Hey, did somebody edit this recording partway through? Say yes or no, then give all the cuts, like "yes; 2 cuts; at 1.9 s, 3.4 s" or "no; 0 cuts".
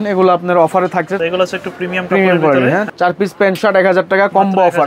yes; 2 cuts; at 1.2 s, 2.9 s